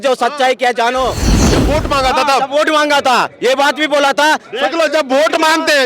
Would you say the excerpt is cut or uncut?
cut